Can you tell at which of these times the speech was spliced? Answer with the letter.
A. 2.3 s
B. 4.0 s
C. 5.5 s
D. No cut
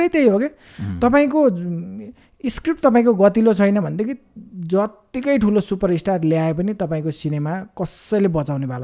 D